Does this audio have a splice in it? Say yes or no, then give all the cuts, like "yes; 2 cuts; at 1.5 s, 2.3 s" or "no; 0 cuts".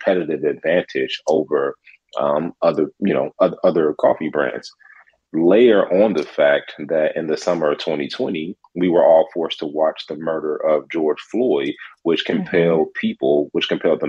no; 0 cuts